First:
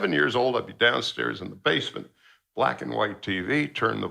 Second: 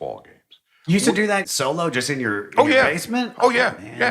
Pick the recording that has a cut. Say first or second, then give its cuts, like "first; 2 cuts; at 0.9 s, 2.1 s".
second; 1 cut; at 1.4 s